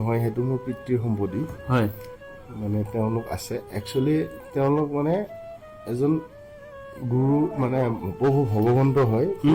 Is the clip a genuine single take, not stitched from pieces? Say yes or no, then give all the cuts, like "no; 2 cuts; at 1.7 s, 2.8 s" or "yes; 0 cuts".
yes; 0 cuts